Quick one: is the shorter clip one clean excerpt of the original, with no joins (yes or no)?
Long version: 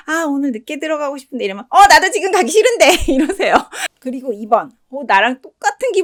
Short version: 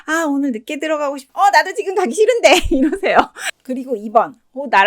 no